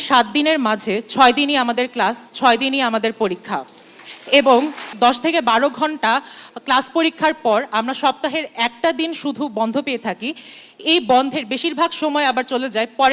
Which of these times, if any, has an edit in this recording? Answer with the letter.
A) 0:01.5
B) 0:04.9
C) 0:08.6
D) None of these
B